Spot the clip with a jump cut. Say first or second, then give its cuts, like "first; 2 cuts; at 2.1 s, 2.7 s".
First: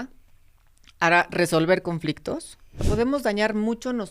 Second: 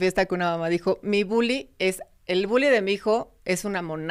first; 1 cut; at 2.8 s